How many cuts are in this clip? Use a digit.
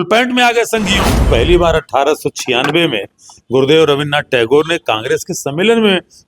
1